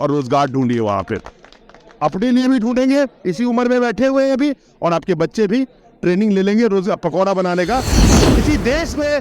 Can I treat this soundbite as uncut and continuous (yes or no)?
no